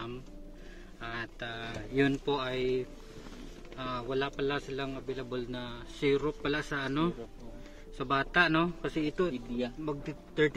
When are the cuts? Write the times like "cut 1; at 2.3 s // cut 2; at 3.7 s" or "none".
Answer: none